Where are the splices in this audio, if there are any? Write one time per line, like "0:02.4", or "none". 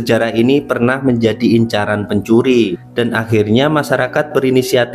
0:02.8